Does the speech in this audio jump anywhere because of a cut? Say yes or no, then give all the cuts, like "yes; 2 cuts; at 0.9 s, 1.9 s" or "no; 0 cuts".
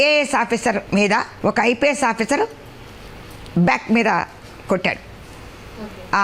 yes; 1 cut; at 1.0 s